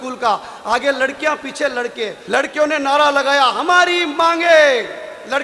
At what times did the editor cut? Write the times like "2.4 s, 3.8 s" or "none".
2.2 s